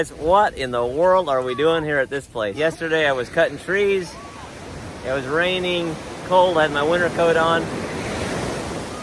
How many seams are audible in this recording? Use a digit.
1